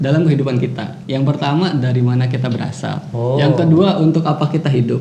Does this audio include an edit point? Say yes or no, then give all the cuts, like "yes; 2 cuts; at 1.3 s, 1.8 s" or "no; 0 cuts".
yes; 2 cuts; at 0.9 s, 3.1 s